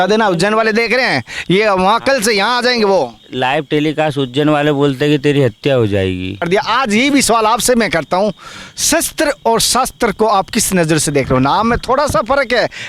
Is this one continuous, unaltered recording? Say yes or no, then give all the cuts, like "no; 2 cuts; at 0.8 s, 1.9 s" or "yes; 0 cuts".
no; 1 cut; at 6.4 s